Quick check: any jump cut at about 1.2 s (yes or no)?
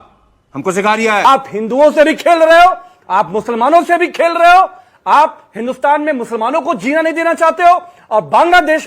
yes